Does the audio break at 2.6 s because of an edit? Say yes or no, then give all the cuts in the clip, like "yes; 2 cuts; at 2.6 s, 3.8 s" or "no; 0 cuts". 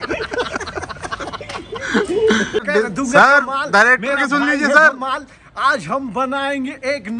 yes; 1 cut; at 2.6 s